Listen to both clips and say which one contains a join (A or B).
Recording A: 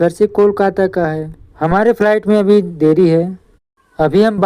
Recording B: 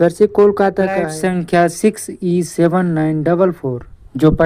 B